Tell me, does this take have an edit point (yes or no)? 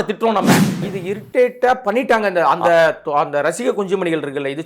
yes